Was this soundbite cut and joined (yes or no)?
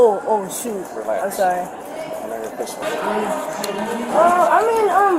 yes